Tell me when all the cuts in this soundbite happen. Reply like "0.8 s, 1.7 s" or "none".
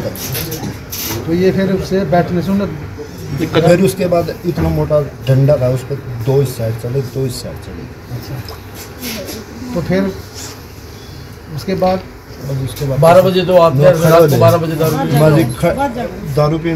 none